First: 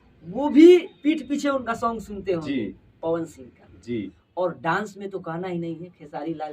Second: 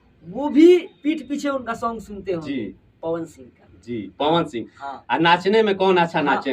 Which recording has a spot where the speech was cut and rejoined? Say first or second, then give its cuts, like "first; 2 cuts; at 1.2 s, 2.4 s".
first; 1 cut; at 4.1 s